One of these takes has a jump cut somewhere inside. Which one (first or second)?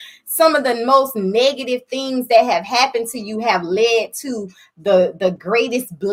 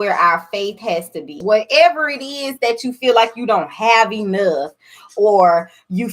second